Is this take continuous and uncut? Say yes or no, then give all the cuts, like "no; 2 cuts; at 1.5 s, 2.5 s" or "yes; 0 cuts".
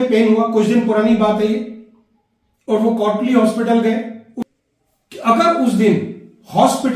no; 1 cut; at 4.2 s